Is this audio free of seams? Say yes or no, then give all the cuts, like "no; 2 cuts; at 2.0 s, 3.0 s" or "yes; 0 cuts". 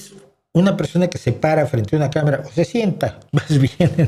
yes; 0 cuts